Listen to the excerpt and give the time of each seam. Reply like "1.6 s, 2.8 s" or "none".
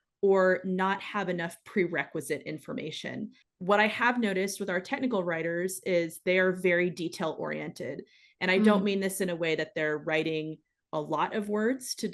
3.4 s